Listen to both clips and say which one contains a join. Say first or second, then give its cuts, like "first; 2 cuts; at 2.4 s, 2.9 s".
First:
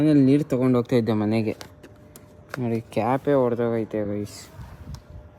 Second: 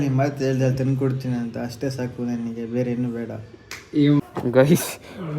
second; 1 cut; at 4.2 s